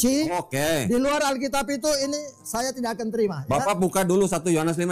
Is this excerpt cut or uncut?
uncut